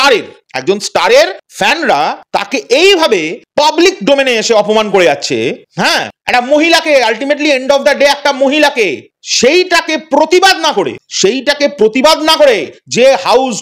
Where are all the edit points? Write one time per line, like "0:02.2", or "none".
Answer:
none